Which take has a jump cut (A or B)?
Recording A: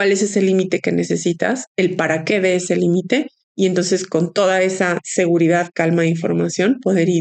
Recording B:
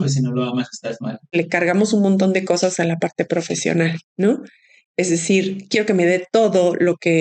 B